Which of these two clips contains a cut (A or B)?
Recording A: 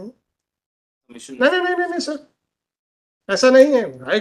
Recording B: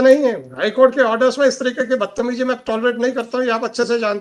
A